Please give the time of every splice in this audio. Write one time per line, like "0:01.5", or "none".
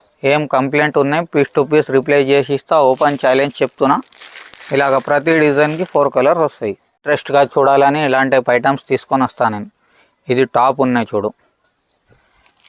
0:07.0